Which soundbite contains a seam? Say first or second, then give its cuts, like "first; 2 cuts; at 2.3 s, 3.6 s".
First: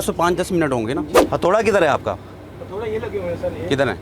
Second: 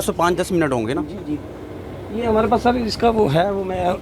first; 1 cut; at 1.2 s